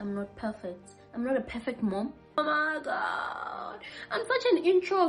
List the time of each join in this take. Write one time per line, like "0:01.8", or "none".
0:02.4

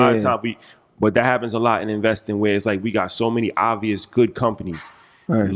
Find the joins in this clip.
none

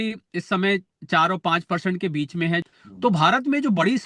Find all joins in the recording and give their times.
0:02.7

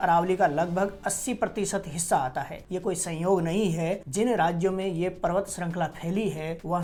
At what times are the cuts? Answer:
none

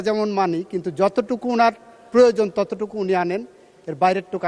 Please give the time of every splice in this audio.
none

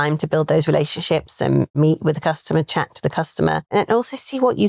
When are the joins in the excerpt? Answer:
0:01.7
0:03.7

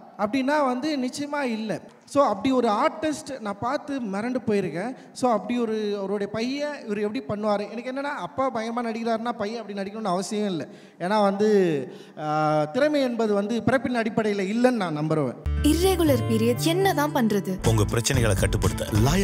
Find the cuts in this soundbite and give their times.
0:01.8
0:15.4

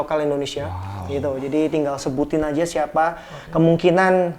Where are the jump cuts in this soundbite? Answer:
none

